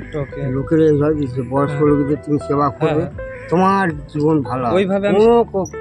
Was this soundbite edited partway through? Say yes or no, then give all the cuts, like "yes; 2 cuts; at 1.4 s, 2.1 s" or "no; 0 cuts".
no; 0 cuts